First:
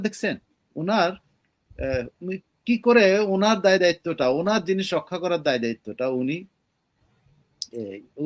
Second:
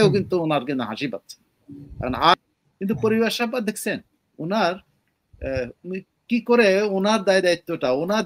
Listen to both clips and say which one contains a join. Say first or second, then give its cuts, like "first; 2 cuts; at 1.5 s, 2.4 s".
second; 1 cut; at 2.3 s